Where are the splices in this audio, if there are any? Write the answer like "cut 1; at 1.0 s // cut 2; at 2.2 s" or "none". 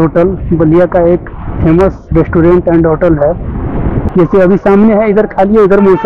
cut 1; at 3.9 s

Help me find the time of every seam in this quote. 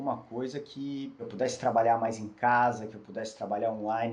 cut 1; at 1.2 s

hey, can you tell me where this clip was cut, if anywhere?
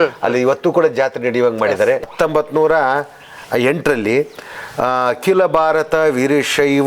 cut 1; at 2.1 s

